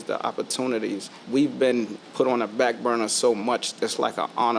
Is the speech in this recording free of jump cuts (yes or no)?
no